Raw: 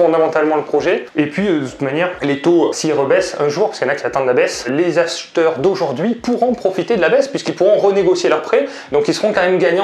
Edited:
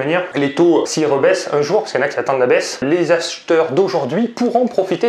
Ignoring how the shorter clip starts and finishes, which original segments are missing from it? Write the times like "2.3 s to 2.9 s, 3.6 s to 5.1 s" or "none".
none